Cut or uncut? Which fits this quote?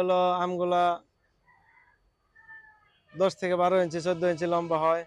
uncut